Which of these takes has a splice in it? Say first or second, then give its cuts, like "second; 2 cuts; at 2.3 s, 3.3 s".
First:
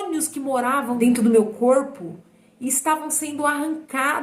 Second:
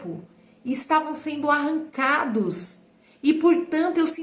first; 1 cut; at 1.1 s